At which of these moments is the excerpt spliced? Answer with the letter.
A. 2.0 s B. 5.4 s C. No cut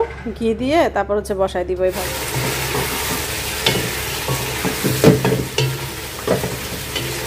A